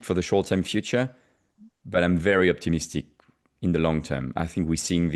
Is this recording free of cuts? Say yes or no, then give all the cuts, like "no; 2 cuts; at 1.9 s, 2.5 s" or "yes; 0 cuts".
yes; 0 cuts